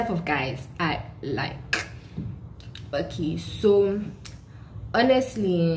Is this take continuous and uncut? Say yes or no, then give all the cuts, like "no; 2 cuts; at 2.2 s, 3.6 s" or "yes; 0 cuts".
yes; 0 cuts